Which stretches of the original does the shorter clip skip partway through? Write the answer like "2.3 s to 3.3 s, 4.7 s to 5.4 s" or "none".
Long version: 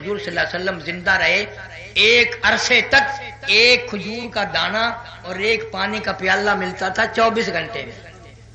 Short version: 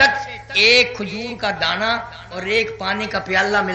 none